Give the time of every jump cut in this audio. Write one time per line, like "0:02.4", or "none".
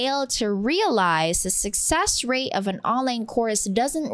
none